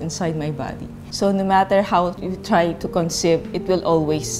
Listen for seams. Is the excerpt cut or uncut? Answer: cut